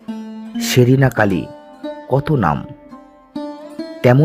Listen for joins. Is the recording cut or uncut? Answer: uncut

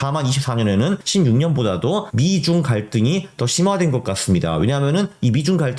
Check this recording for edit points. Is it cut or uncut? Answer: cut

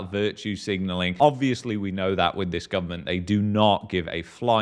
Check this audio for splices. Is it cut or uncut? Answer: uncut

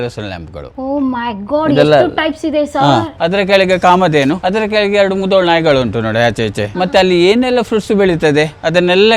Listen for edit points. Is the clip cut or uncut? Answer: cut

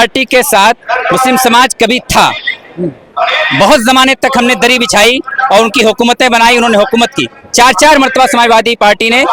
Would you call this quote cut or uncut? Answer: uncut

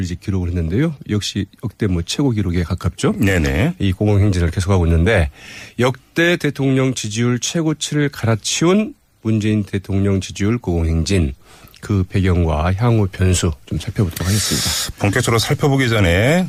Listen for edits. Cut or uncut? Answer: uncut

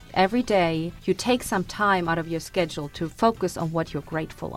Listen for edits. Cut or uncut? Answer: cut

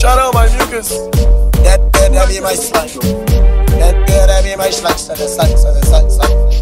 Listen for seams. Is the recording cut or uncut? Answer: uncut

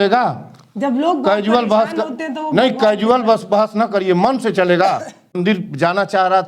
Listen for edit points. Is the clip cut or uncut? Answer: cut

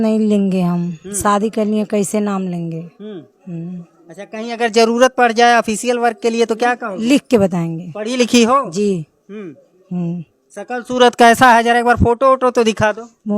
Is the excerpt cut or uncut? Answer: uncut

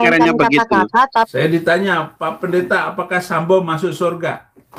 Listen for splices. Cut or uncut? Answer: cut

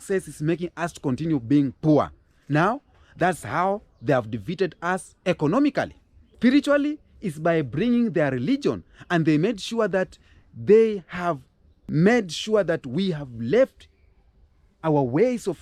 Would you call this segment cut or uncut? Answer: uncut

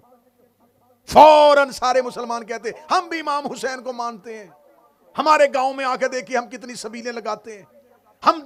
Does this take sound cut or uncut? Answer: uncut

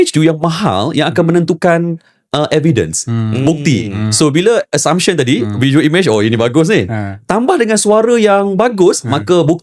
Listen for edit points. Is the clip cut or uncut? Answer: uncut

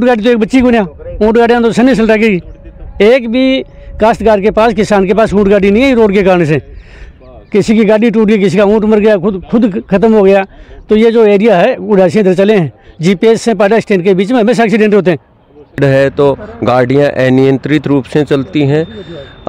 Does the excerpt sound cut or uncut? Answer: uncut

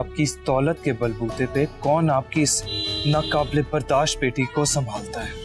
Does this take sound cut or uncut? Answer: uncut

